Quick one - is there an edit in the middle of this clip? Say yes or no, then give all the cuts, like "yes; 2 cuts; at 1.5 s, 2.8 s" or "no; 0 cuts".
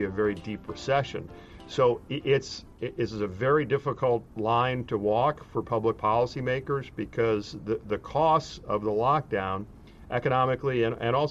yes; 2 cuts; at 2.7 s, 4.3 s